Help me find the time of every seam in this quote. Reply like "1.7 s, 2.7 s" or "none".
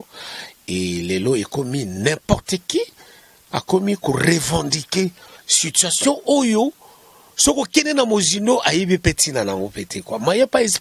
none